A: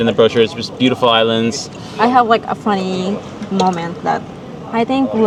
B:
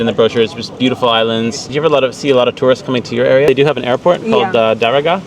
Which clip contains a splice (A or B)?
B